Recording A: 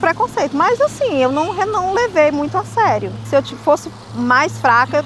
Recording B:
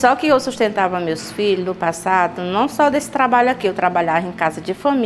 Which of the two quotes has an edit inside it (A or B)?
A